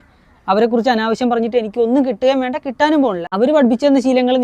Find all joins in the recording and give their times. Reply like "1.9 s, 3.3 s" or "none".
3.3 s